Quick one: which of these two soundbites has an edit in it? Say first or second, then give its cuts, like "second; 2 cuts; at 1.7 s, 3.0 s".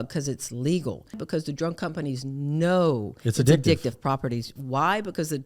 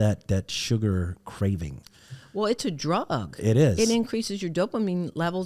first; 1 cut; at 1.2 s